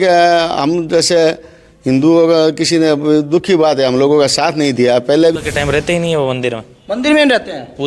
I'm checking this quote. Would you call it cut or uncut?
cut